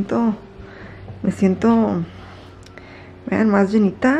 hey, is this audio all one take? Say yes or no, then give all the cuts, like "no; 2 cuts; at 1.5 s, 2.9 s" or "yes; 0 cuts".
yes; 0 cuts